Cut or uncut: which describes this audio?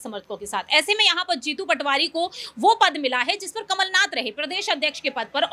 uncut